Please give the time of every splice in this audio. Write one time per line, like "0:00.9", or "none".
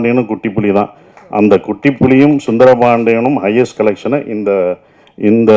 none